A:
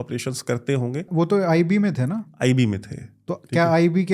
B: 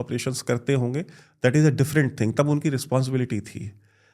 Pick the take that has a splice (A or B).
A